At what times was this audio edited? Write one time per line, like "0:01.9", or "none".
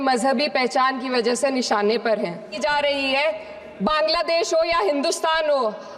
0:02.5